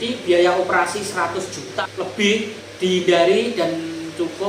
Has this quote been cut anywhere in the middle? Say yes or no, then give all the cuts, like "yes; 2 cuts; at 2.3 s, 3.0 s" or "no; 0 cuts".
yes; 2 cuts; at 1.7 s, 2.6 s